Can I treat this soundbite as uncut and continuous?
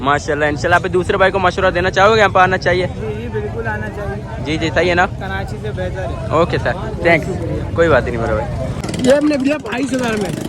no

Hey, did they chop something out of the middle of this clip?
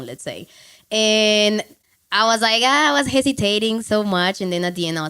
yes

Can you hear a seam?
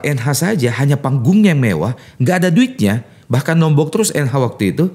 no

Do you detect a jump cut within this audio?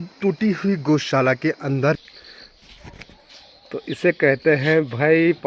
yes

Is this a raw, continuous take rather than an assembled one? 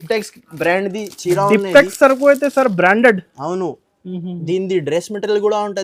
yes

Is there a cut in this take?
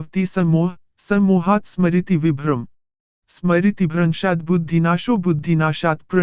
no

